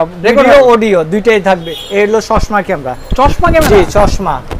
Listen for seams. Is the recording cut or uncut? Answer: cut